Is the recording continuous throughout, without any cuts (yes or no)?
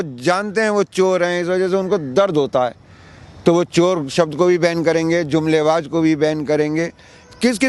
yes